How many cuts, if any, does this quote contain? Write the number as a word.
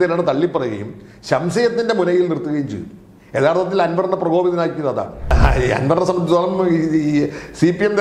one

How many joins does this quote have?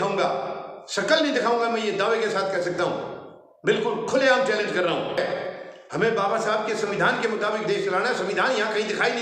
one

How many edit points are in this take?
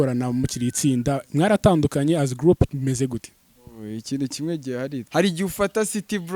one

